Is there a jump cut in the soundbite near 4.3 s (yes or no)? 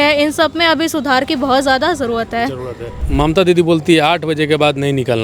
no